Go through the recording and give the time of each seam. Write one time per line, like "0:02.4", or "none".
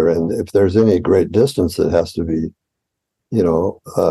none